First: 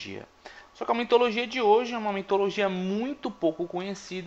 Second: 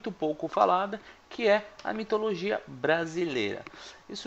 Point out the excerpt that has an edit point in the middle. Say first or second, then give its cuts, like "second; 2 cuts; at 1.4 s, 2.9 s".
second; 1 cut; at 2.3 s